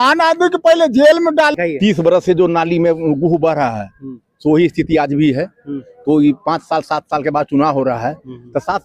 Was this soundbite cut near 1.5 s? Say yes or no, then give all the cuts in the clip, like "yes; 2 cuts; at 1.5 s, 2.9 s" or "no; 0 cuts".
yes; 1 cut; at 1.5 s